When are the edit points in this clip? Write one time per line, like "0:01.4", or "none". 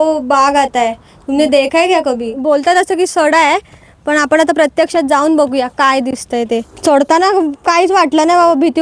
0:02.3
0:06.7